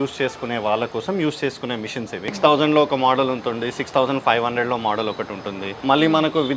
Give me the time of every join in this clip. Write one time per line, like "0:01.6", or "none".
0:02.3
0:05.7